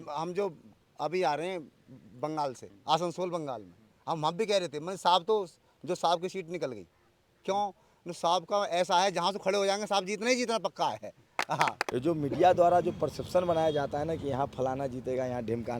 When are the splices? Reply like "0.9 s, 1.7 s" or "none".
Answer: 2.7 s, 11.9 s